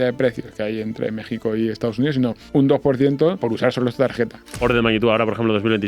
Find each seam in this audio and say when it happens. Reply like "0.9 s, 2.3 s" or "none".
2.4 s, 3.4 s, 4.6 s

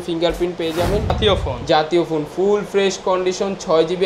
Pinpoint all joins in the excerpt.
1.2 s

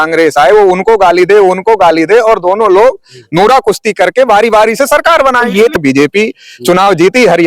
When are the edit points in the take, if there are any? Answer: 5.8 s

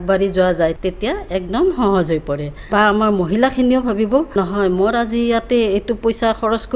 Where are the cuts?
0.8 s, 2.5 s, 4.3 s

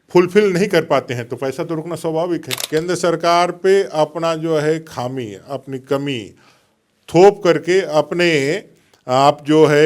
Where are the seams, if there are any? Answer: 2.6 s

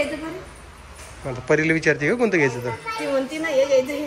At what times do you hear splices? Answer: none

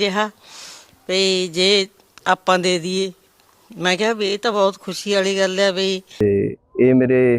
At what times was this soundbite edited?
6.1 s

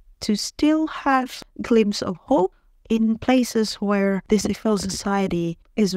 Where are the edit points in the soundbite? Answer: 1.4 s, 2.7 s, 4.2 s

